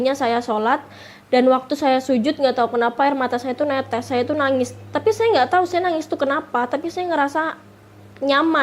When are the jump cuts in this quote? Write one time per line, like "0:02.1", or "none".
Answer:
none